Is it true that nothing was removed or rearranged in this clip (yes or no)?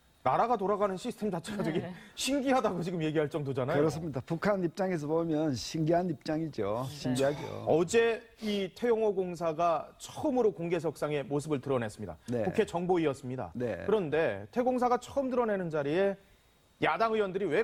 yes